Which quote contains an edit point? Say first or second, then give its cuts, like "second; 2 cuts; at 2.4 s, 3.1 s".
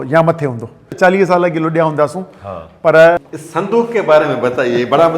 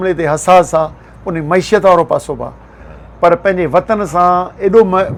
first; 2 cuts; at 0.9 s, 3.2 s